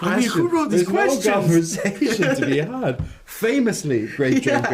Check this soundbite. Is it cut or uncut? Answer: uncut